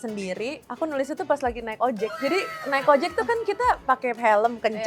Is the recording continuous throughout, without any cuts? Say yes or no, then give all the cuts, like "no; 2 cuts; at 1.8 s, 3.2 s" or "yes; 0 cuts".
no; 1 cut; at 2.2 s